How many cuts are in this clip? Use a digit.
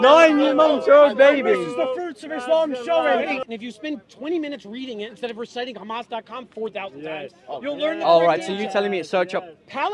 1